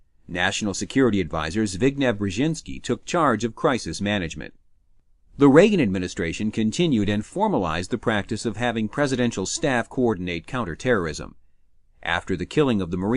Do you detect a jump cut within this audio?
yes; 1 cut; at 7.2 s

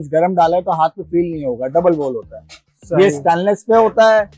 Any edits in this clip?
no; 0 cuts

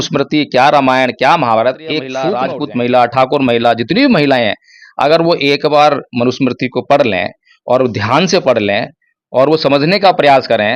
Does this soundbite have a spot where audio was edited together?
yes; 1 cut; at 2.3 s

